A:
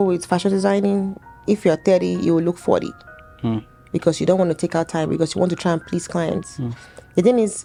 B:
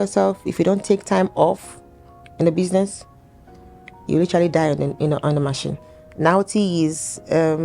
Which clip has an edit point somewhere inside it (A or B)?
B